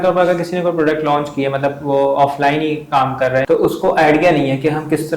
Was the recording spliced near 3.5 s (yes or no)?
yes